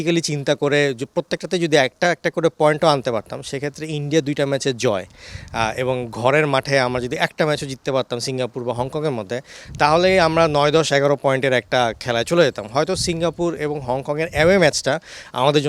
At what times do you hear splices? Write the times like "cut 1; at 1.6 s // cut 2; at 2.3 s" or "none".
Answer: none